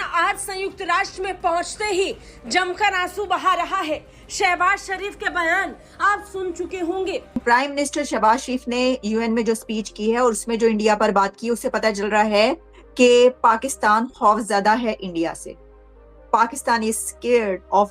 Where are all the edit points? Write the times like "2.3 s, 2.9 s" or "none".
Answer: 7.4 s